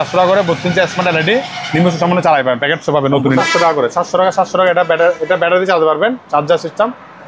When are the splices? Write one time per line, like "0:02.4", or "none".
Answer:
0:03.4